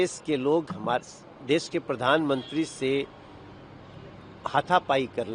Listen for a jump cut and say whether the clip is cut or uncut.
uncut